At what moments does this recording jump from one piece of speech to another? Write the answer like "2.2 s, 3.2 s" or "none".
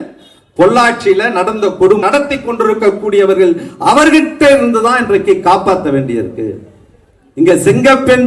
2.0 s